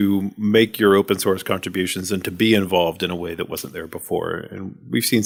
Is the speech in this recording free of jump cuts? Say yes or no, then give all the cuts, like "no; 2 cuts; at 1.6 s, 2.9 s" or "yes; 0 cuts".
yes; 0 cuts